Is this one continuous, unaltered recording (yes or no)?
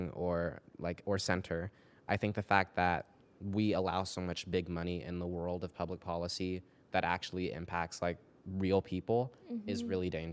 yes